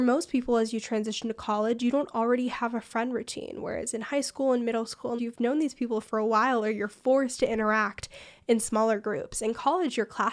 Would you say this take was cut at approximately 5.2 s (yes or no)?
yes